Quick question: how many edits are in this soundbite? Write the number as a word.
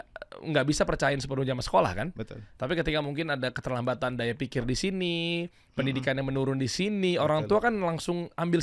zero